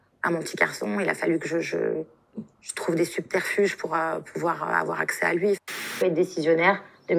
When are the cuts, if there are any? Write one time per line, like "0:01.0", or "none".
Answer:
0:05.9